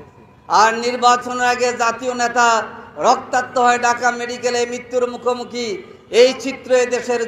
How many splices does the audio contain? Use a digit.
0